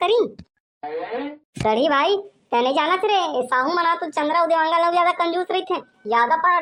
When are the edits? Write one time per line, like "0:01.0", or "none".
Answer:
none